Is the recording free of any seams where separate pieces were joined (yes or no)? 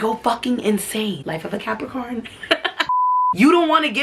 no